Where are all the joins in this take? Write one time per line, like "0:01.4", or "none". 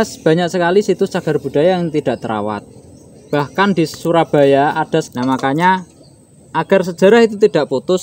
0:05.0

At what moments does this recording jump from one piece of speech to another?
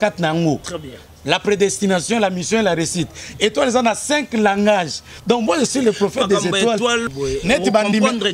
0:07.0

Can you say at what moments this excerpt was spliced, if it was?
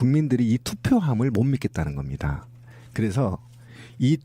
0:02.6

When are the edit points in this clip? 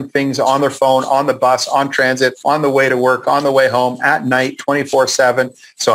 0:02.4

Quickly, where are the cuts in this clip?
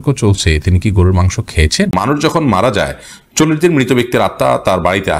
0:01.9

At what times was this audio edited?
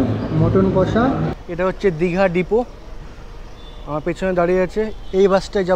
0:01.3

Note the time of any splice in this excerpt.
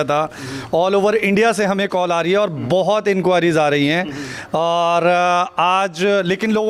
none

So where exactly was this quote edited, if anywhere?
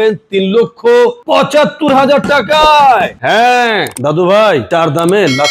none

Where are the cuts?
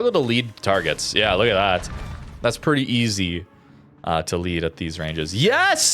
0:02.3

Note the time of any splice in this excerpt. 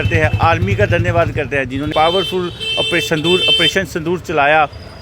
0:01.9

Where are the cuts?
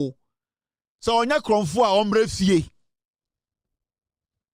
none

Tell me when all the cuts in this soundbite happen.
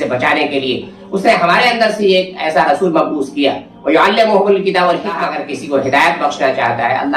0:05.3

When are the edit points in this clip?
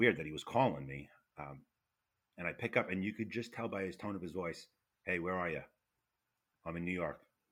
none

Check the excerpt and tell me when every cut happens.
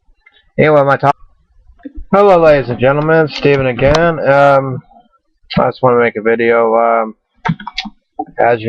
none

